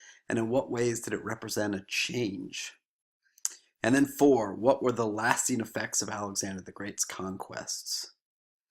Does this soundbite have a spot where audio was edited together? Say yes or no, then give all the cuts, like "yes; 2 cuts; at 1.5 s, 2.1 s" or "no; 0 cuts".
yes; 1 cut; at 5.9 s